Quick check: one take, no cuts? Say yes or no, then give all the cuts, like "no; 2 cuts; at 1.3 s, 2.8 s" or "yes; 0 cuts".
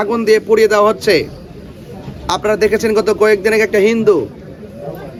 yes; 0 cuts